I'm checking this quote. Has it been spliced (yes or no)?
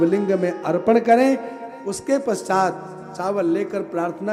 no